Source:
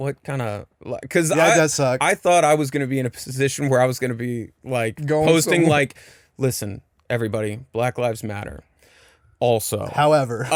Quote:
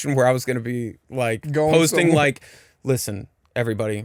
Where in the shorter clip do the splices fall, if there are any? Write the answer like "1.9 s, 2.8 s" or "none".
none